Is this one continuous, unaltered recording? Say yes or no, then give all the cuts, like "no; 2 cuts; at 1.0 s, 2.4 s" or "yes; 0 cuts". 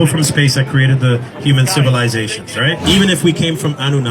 no; 1 cut; at 2.8 s